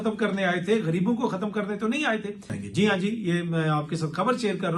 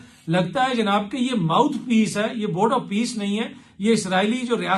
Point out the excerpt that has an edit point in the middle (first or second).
first